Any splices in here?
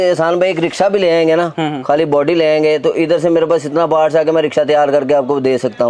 no; 0 cuts

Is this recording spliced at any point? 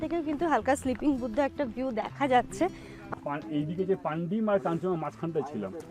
yes; 1 cut; at 3.0 s

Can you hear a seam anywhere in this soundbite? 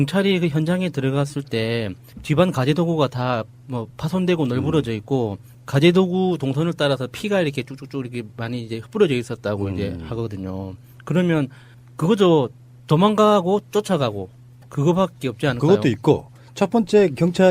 yes; 1 cut; at 1.4 s

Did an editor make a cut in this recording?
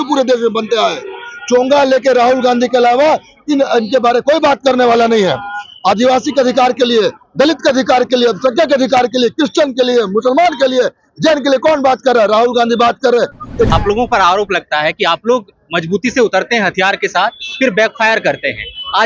yes; 1 cut; at 13.7 s

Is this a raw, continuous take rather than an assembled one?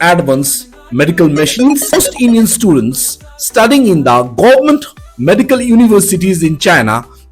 no; 1 cut; at 1.9 s

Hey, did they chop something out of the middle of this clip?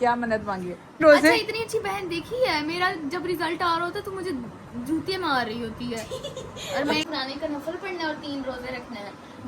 yes; 2 cuts; at 1.0 s, 7.0 s

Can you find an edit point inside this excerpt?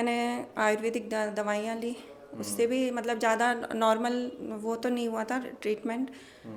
no; 0 cuts

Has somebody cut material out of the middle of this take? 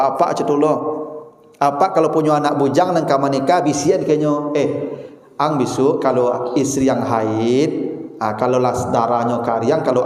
no; 0 cuts

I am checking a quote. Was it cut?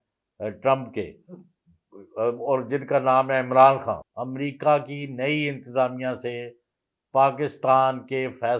yes; 1 cut; at 4.1 s

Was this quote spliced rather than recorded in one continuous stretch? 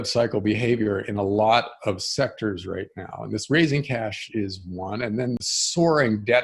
yes; 1 cut; at 5.5 s

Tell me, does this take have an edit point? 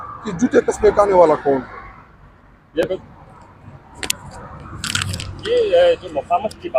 no; 0 cuts

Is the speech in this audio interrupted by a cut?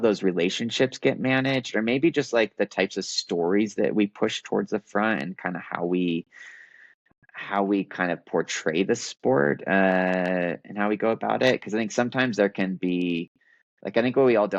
no; 0 cuts

